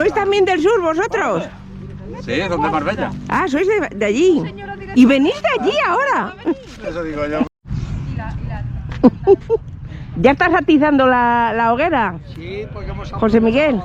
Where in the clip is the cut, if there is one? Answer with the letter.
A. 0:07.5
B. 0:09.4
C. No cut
A